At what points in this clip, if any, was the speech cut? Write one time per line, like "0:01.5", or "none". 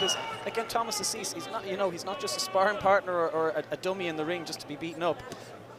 none